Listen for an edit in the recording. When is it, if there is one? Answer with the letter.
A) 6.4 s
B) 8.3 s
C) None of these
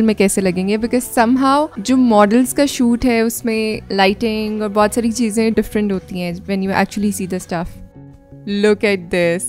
C